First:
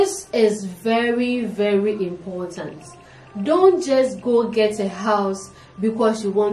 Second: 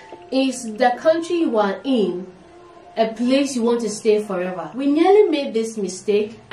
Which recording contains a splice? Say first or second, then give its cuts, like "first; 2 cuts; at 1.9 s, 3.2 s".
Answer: second; 1 cut; at 4.6 s